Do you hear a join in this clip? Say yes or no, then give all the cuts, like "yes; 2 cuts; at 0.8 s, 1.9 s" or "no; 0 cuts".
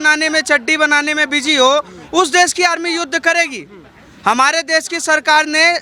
no; 0 cuts